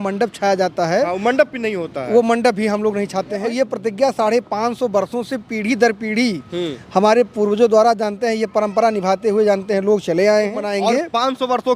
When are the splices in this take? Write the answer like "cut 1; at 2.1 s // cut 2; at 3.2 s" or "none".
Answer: cut 1; at 3.5 s // cut 2; at 10.7 s